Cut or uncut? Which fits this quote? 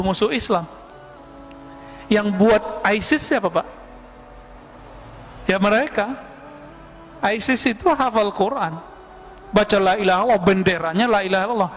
uncut